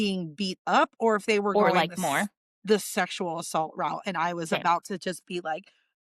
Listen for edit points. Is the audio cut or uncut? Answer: uncut